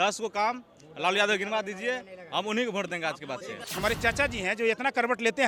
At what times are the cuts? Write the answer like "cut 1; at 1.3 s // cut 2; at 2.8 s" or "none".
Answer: cut 1; at 3.6 s